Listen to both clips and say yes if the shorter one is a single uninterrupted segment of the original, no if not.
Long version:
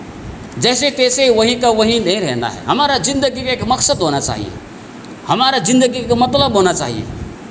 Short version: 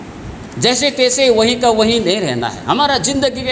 yes